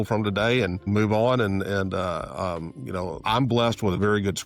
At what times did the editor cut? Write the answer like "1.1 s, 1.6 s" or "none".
0.9 s, 3.2 s